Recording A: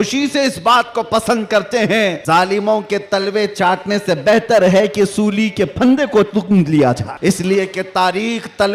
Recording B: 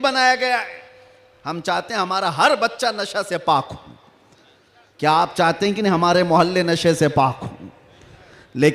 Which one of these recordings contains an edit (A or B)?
A